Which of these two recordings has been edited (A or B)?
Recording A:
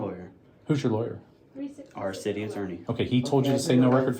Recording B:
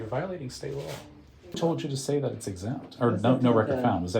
B